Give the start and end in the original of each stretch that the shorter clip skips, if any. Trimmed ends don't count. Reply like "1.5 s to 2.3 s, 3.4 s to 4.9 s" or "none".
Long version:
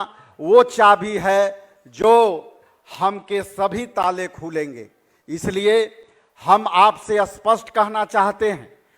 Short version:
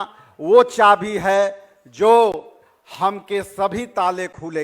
none